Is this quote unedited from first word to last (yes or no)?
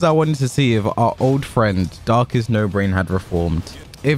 yes